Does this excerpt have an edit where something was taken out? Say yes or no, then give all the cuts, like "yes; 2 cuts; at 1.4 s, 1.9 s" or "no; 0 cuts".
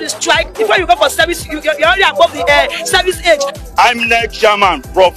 yes; 1 cut; at 3.5 s